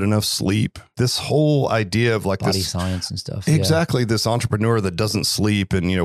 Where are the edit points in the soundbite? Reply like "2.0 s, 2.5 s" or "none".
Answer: 0.9 s

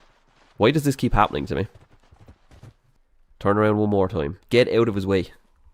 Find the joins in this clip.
2.8 s

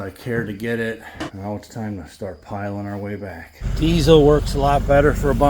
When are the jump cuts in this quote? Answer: 1.3 s, 3.6 s

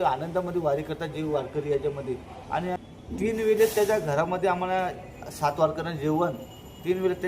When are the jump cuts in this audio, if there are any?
2.8 s

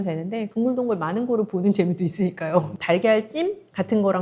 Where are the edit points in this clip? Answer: 2.7 s

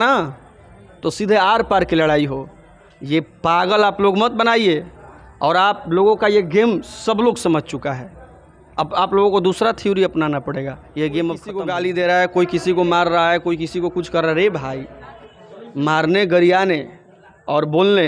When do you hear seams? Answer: 11.5 s

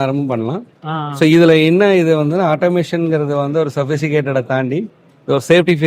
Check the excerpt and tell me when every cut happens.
none

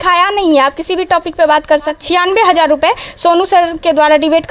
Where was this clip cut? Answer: 2.0 s

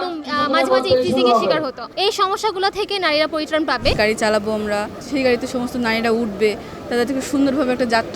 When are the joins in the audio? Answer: 1.8 s, 3.9 s, 5.0 s

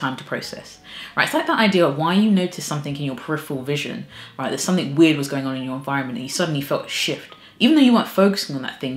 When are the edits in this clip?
none

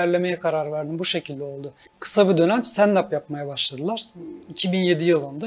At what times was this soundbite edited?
2.0 s

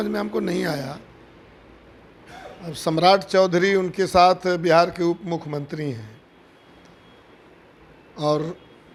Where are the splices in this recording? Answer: none

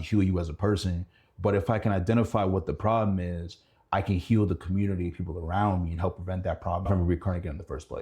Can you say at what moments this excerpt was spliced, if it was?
6.9 s

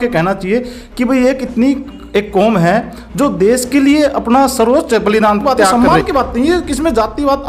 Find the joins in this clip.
5.6 s

